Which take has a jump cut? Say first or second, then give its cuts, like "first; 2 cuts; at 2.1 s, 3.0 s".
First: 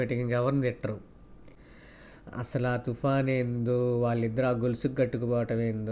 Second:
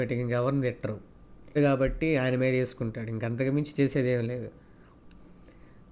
first; 1 cut; at 1.4 s